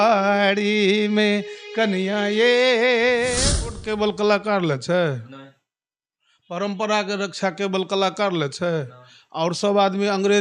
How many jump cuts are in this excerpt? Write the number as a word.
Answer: one